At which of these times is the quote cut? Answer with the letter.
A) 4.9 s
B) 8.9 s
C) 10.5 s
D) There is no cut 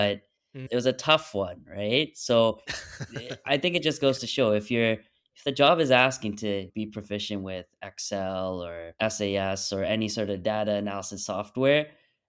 B